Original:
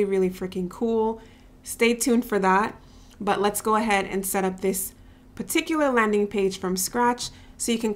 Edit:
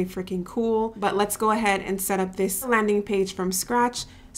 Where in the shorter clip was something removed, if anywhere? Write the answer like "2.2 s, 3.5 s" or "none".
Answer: 0.9 s, 2.7 s

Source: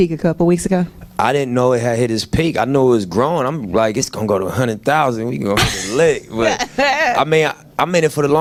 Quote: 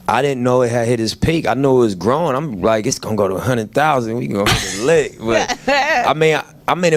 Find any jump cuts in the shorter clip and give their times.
none

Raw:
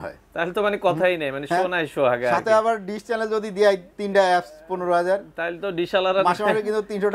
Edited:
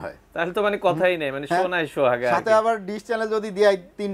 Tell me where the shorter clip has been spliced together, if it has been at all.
none

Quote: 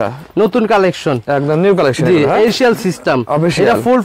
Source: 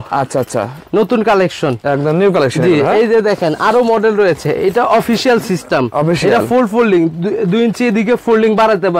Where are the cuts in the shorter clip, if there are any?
2.5 s

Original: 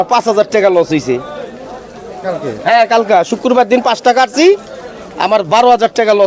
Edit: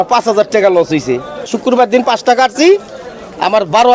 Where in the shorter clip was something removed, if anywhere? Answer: 1.5 s

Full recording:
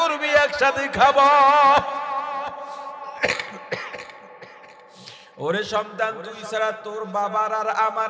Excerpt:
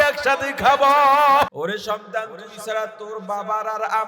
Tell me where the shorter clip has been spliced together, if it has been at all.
1.5 s

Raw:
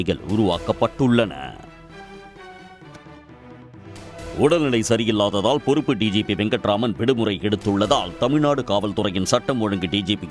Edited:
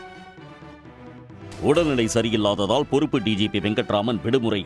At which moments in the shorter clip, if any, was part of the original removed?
1.6 s

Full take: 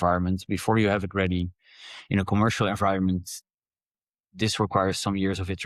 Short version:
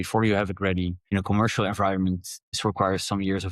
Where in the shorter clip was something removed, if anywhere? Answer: 1.0 s, 2.6 s

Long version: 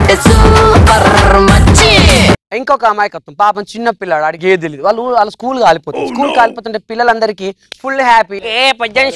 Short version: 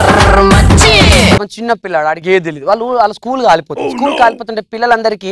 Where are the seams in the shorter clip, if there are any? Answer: 1.5 s

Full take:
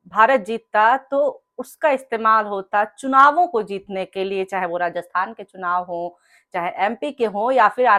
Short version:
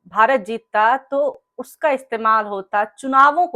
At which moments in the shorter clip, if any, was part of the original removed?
none

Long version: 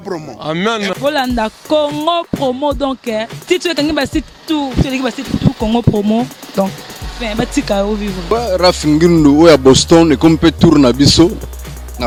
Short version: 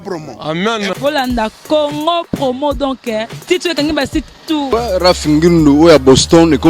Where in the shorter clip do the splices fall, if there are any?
4.7 s

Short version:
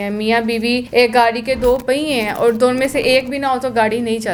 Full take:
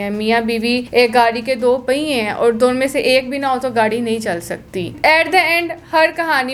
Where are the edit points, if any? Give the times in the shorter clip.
none

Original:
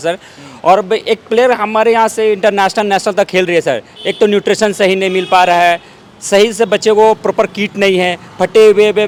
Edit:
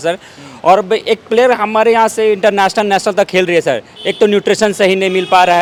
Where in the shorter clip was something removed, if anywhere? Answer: none

